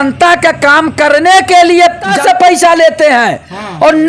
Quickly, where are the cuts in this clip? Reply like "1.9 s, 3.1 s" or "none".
2.1 s